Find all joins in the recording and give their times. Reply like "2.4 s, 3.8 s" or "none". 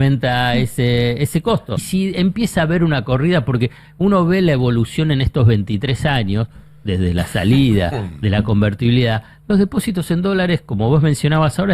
1.9 s